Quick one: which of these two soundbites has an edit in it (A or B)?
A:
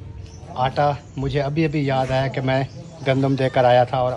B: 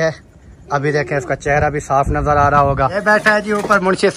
B